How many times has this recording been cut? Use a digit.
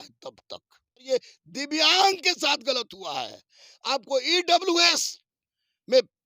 1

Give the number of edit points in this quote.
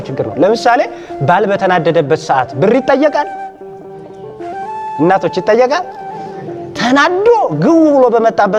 0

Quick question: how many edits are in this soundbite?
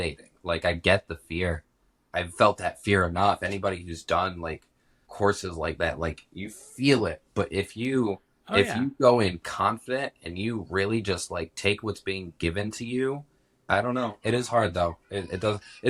0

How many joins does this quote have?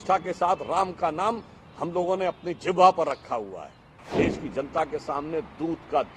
1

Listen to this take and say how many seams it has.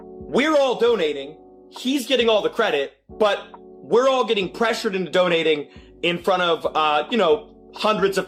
0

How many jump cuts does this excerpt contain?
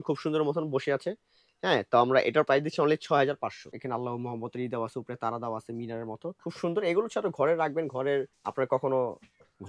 2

